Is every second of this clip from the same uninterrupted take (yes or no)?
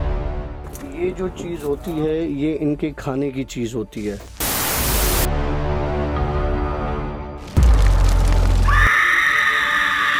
yes